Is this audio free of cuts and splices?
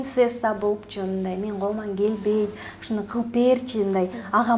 yes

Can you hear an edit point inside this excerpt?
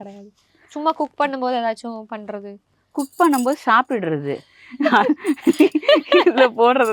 no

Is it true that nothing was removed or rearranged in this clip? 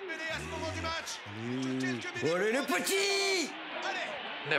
yes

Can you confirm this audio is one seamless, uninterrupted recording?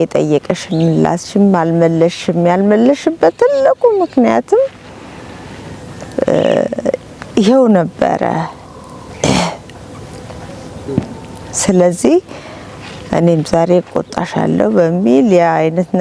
yes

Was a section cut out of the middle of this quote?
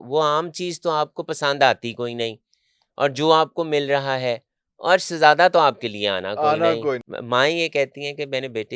yes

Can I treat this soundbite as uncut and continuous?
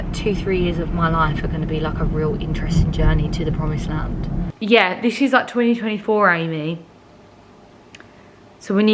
no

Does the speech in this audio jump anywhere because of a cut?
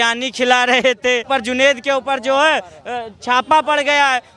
yes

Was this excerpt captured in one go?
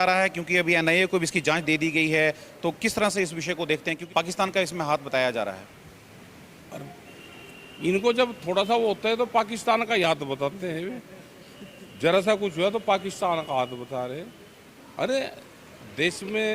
no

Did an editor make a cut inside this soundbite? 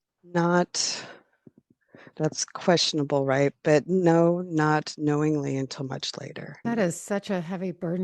yes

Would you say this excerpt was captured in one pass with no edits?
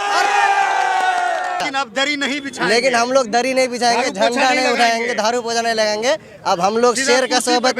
no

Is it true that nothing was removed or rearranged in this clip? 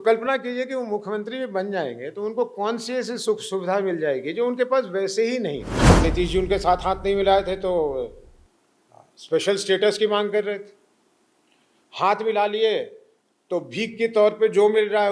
no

